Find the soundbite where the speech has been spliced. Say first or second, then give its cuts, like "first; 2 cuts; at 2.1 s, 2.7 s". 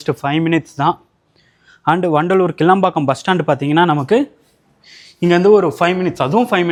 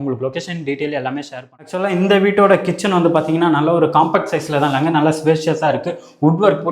second; 1 cut; at 1.7 s